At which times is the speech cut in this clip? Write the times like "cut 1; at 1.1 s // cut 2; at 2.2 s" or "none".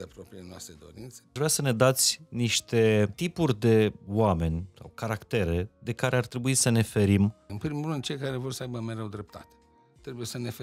cut 1; at 1.3 s // cut 2; at 3.1 s // cut 3; at 7.5 s